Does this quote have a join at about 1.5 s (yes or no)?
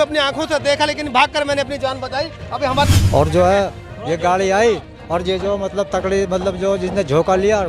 no